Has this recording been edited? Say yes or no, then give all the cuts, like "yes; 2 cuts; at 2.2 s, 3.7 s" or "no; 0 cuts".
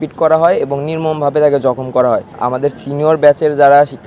yes; 1 cut; at 2.4 s